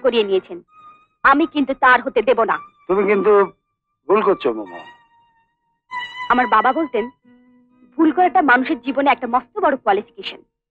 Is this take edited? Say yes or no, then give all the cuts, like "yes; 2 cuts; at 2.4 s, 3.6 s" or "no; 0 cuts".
no; 0 cuts